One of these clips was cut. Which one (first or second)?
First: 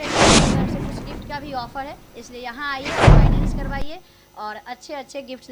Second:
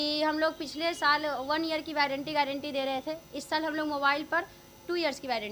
first